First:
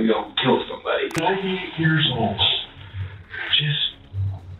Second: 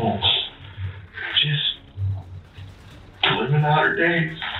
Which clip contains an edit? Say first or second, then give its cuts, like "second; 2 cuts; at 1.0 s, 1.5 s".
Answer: first; 1 cut; at 1.2 s